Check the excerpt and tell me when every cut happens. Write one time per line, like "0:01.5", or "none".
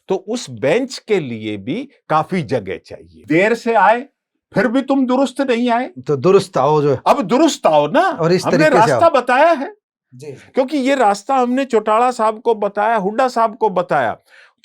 0:03.1

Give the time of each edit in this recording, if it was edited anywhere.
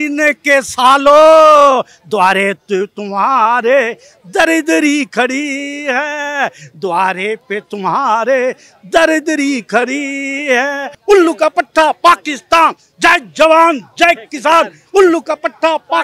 0:10.9

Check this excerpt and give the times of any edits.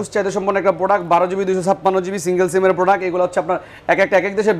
none

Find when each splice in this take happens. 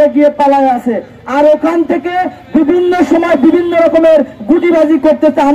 none

